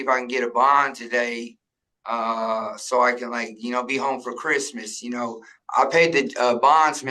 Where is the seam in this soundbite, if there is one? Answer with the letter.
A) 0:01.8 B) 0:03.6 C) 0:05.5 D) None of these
C